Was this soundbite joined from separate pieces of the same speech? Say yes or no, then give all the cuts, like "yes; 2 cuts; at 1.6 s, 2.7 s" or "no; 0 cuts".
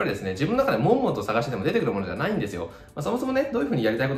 no; 0 cuts